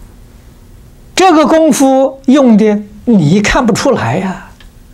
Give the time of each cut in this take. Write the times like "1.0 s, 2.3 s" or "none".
1.0 s